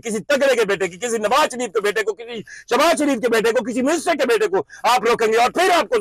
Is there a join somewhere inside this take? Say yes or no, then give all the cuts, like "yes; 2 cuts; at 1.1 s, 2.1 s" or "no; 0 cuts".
no; 0 cuts